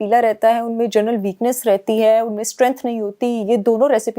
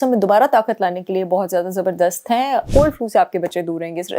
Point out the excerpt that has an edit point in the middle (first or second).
second